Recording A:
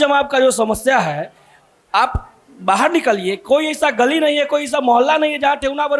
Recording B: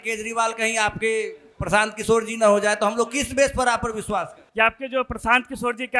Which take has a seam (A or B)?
B